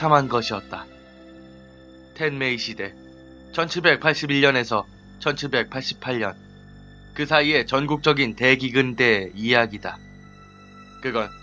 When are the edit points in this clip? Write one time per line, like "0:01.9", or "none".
none